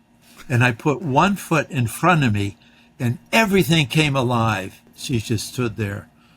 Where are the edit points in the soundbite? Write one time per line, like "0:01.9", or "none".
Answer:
0:04.9